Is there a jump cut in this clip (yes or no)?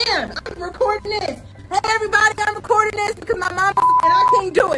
no